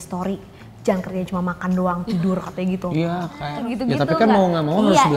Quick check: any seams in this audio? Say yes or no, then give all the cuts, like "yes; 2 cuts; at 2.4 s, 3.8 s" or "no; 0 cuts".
yes; 1 cut; at 3.3 s